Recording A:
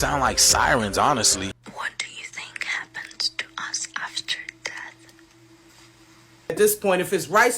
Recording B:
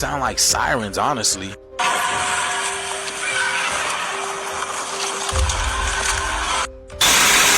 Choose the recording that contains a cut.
A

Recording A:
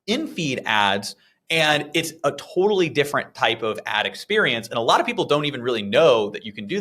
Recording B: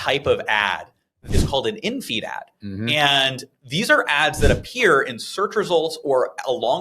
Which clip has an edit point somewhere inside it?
B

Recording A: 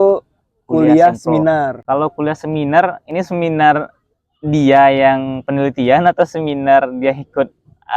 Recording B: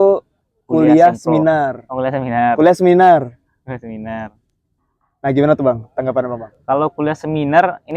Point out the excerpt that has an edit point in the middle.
A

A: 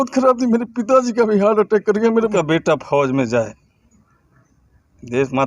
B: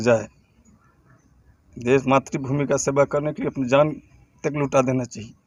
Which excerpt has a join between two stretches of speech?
A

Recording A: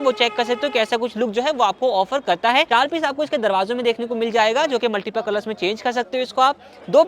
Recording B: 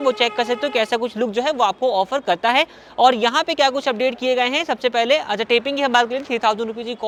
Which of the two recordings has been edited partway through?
A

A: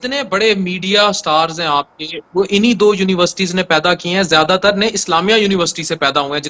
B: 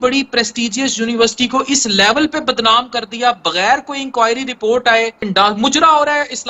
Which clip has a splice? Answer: B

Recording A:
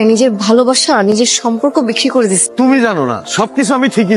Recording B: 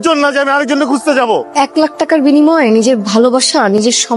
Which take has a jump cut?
B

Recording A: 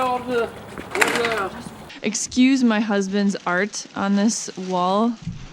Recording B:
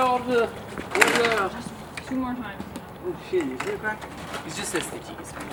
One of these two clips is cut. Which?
A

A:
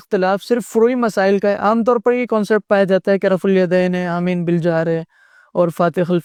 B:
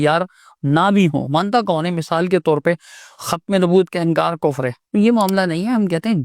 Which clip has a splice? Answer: B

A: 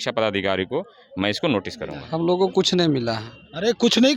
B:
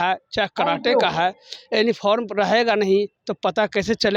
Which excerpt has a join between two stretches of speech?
A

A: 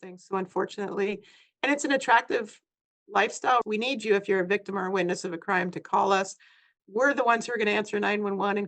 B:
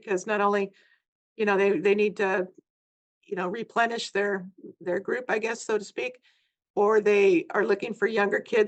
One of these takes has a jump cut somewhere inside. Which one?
A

